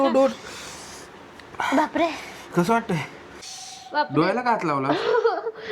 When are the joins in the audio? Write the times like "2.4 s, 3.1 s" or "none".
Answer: 3.3 s